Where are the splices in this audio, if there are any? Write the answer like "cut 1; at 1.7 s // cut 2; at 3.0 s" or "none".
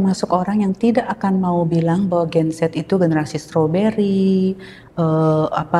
none